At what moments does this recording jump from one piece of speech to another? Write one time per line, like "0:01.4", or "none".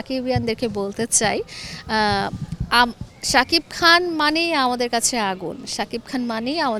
none